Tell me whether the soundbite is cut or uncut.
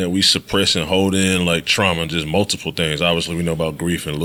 uncut